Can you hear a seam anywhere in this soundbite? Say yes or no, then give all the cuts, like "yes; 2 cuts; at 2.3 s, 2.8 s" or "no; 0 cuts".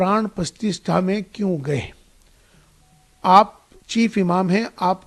no; 0 cuts